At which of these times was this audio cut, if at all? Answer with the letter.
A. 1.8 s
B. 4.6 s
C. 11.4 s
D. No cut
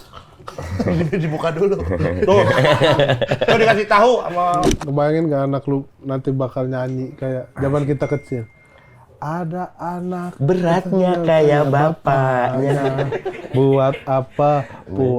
B